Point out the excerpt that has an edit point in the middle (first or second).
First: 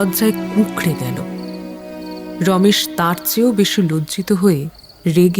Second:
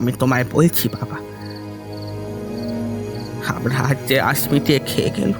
second